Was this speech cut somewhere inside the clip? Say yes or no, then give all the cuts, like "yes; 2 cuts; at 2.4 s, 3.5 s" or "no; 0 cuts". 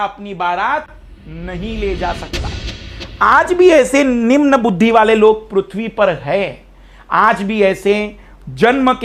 no; 0 cuts